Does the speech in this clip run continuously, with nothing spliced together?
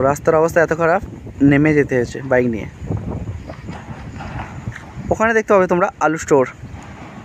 yes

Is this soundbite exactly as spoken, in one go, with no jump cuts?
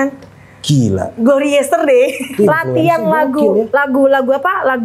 no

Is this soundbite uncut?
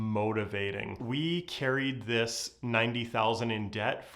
no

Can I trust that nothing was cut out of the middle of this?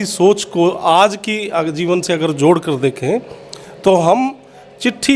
yes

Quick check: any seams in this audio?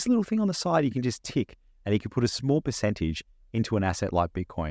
no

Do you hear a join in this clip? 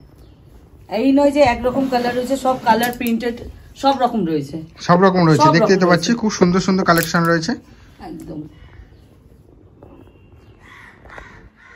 no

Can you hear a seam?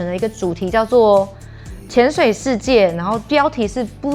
no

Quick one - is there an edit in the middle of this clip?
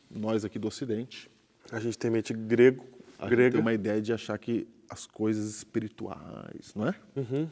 no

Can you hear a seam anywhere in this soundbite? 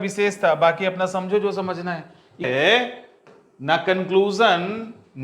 yes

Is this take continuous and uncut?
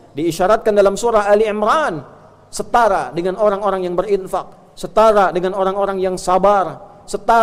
yes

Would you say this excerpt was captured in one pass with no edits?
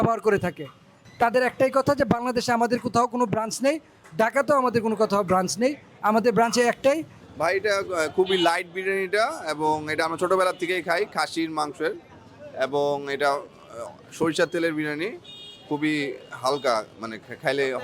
no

